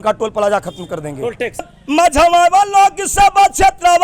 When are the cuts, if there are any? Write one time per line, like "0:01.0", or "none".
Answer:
0:01.7